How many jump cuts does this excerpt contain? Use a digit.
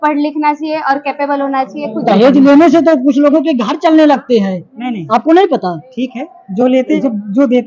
2